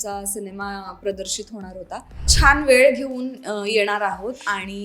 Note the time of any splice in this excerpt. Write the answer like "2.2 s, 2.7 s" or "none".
2.3 s